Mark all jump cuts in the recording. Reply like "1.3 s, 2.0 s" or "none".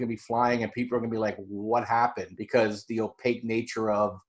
2.3 s

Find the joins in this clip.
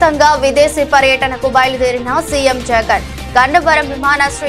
none

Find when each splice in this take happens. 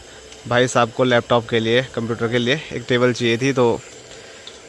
none

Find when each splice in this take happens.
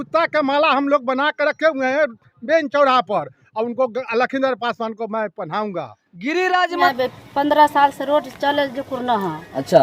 6.9 s

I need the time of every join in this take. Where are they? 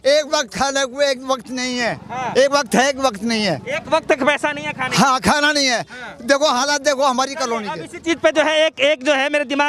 none

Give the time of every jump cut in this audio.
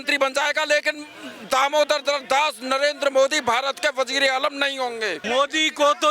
5.2 s

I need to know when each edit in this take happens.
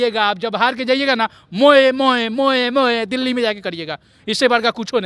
none

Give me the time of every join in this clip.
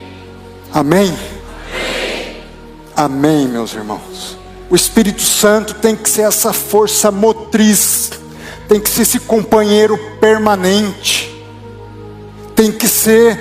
4.5 s

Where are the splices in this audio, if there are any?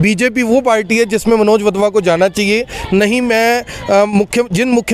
none

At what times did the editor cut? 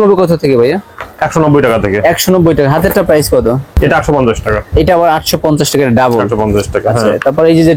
none

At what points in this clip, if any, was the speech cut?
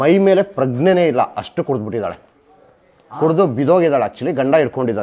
none

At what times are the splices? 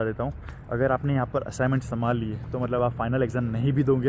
none

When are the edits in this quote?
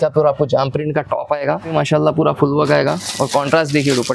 1.7 s

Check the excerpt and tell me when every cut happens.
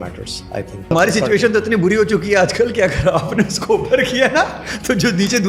0.9 s

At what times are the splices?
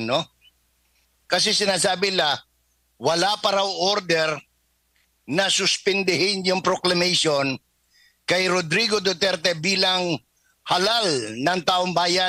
none

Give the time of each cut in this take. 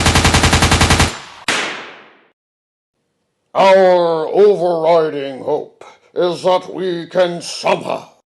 1.2 s

